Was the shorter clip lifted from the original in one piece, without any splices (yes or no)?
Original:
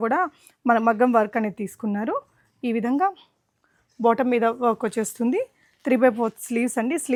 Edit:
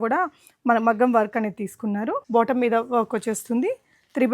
no